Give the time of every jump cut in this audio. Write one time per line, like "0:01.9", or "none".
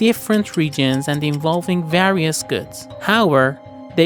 none